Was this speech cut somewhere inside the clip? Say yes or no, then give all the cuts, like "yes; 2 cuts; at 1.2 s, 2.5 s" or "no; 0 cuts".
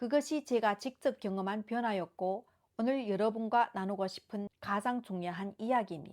yes; 1 cut; at 4.6 s